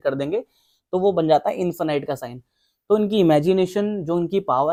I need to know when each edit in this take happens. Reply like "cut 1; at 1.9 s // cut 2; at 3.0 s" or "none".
none